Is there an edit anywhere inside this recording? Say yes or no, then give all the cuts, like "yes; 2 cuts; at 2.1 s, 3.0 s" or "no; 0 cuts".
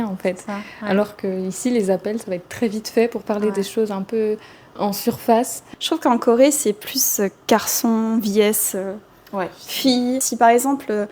yes; 2 cuts; at 5.7 s, 10.3 s